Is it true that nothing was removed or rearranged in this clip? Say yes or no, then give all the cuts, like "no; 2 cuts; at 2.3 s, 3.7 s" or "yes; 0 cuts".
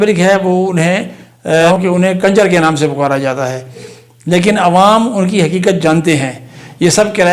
no; 2 cuts; at 1.8 s, 3.9 s